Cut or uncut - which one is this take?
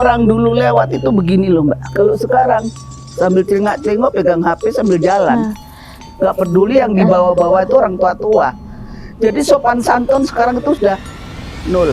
cut